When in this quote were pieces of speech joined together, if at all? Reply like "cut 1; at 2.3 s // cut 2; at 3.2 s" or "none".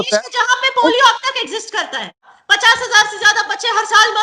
cut 1; at 2.3 s